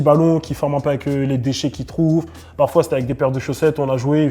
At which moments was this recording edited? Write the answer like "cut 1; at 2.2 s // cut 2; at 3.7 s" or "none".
none